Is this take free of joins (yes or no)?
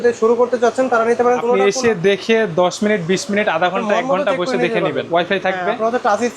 no